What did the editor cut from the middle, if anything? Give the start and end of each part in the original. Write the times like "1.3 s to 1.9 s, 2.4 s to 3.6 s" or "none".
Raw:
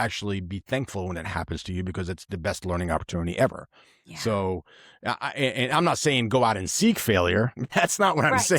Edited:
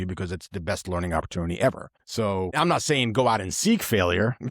4.3 s to 5.6 s